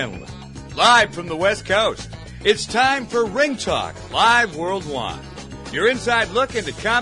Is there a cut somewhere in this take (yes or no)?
no